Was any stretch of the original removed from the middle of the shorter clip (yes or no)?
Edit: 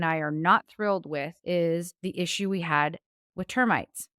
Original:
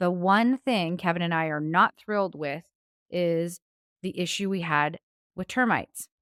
yes